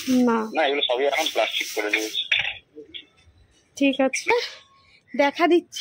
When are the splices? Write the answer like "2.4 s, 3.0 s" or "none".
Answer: 4.3 s